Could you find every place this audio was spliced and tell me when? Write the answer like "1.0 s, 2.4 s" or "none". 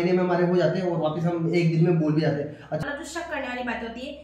2.8 s